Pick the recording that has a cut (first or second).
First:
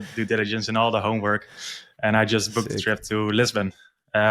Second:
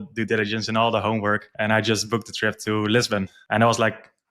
second